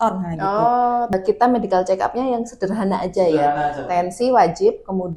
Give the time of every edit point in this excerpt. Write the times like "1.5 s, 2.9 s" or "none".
1.1 s